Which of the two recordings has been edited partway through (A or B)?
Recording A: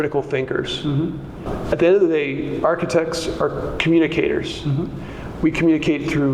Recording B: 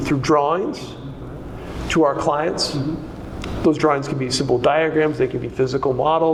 A